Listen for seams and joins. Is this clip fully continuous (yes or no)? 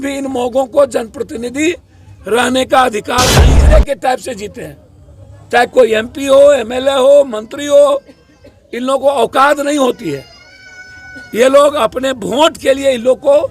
no